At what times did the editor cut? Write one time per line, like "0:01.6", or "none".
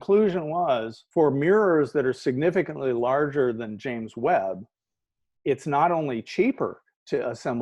0:01.0

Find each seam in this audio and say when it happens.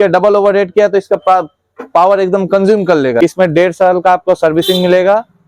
0:03.2

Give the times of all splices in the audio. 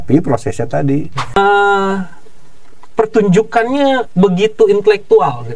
0:01.4

